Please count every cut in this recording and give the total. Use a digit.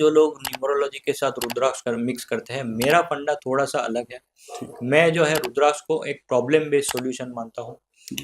1